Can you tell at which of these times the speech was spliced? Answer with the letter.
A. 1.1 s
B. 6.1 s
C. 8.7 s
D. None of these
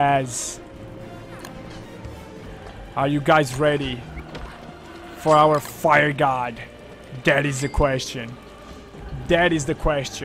B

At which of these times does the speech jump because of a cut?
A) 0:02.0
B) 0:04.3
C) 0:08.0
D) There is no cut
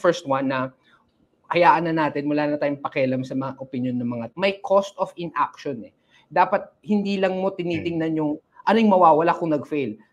B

